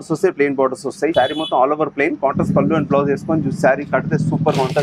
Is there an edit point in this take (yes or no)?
yes